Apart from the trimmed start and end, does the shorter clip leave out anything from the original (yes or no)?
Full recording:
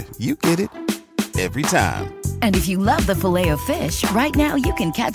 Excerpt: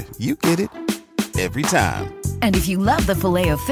no